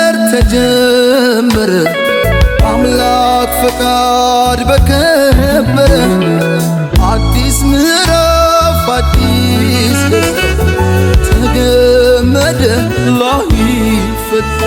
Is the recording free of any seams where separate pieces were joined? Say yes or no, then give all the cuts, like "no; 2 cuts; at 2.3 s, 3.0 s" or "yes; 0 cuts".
yes; 0 cuts